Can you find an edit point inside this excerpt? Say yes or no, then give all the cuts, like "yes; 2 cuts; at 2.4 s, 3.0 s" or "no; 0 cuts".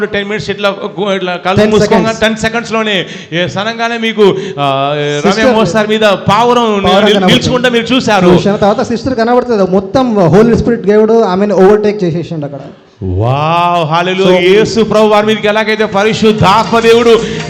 no; 0 cuts